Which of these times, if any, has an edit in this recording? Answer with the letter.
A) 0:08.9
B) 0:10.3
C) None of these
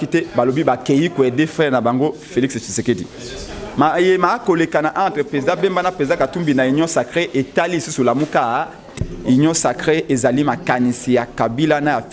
A